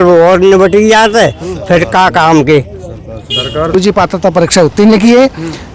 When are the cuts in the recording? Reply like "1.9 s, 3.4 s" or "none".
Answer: 3.8 s